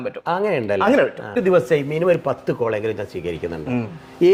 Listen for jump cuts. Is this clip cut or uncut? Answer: uncut